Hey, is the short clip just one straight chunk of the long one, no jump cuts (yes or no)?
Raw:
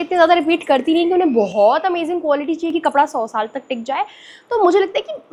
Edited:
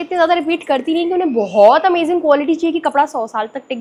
yes